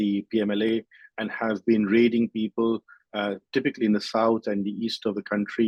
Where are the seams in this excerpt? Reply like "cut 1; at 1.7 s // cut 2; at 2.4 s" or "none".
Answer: none

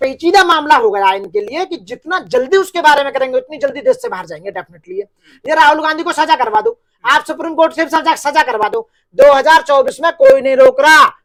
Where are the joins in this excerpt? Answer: none

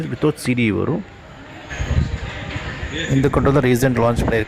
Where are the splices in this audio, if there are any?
cut 1; at 1.7 s

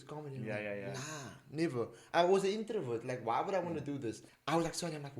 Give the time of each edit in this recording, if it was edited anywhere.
cut 1; at 4.3 s

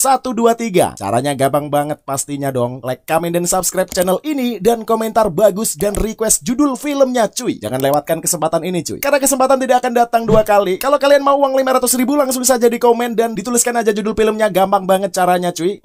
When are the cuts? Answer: cut 1; at 0.9 s

